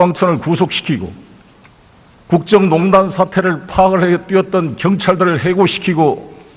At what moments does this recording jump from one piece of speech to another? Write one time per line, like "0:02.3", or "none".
none